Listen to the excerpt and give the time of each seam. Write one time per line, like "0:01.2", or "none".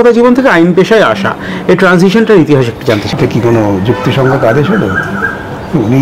0:03.1